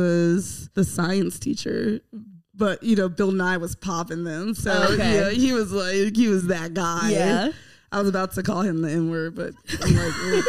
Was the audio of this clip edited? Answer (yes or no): no